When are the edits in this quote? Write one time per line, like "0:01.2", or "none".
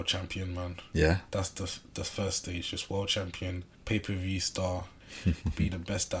0:03.7
0:05.0